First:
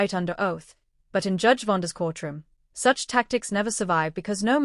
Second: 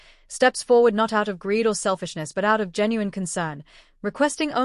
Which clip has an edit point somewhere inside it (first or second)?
first